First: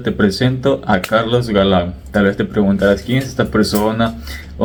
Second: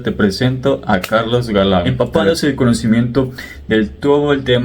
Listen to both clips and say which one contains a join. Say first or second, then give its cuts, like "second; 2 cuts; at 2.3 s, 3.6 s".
second; 1 cut; at 1.9 s